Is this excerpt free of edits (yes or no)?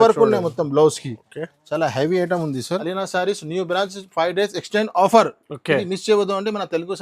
no